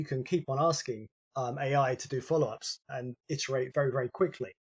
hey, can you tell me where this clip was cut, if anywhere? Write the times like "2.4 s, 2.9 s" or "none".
none